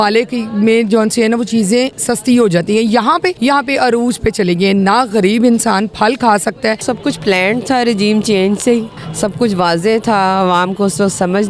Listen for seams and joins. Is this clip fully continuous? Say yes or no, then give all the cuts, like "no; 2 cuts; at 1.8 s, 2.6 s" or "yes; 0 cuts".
no; 4 cuts; at 2.0 s, 3.4 s, 6.8 s, 9.0 s